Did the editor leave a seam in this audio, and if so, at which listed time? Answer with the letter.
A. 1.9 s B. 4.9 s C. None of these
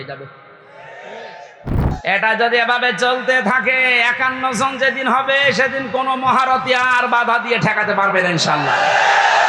A